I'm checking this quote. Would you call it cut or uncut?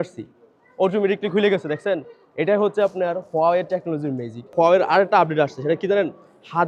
cut